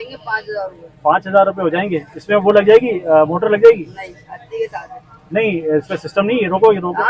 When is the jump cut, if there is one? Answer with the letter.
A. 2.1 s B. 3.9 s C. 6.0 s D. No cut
D